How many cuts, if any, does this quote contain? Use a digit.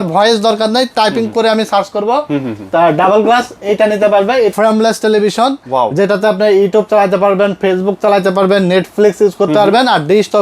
1